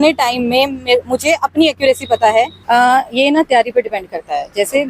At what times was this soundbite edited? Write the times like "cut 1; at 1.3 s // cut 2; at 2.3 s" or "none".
cut 1; at 2.6 s